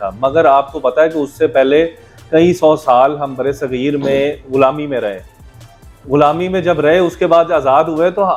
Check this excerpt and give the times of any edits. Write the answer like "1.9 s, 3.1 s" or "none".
none